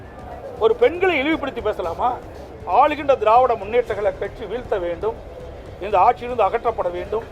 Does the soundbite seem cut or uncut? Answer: cut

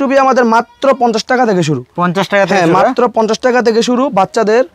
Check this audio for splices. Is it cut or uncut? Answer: uncut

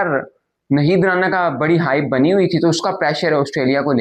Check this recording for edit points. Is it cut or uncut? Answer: uncut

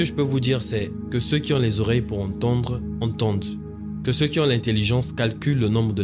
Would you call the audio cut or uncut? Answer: uncut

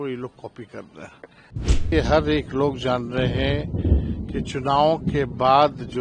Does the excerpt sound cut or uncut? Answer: cut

